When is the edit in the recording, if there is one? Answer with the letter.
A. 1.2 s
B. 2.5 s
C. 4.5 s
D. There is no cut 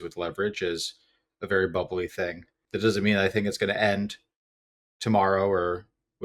B